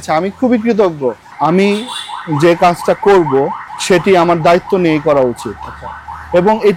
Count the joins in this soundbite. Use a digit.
2